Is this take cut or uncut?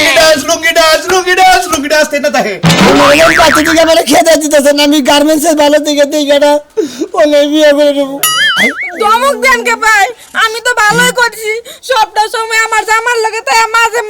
cut